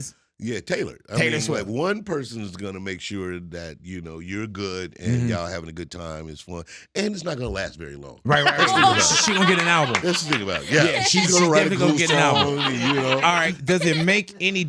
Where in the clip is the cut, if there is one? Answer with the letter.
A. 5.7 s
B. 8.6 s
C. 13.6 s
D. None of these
C